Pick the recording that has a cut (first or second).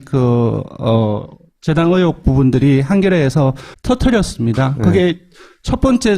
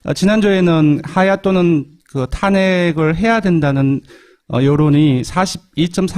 first